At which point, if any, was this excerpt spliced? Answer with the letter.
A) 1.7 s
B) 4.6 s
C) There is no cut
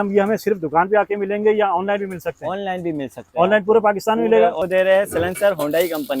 B